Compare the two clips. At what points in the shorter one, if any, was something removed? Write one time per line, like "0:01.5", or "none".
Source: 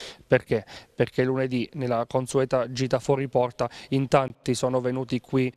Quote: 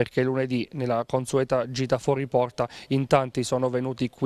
0:03.3